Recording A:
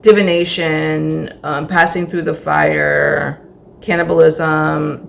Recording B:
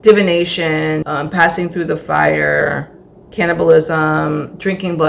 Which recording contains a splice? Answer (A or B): B